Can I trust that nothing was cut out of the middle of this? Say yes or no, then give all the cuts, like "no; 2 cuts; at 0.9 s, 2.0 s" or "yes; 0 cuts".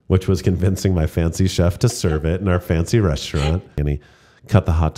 no; 1 cut; at 3.8 s